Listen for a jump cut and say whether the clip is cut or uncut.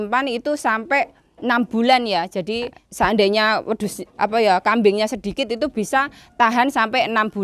cut